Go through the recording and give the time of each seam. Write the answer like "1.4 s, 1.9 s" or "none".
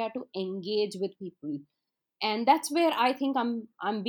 none